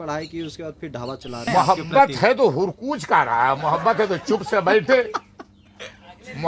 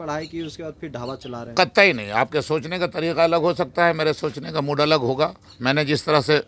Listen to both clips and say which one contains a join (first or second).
first